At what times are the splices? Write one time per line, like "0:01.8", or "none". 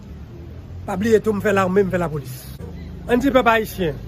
0:02.6